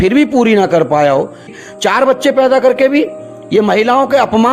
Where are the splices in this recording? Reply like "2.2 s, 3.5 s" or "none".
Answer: 1.5 s